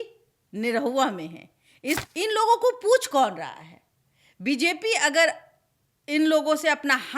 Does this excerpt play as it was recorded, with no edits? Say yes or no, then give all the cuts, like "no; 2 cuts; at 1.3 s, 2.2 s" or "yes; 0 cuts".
no; 1 cut; at 2.0 s